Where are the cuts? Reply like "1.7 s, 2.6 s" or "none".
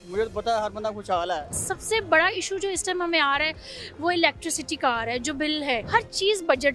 1.7 s, 5.8 s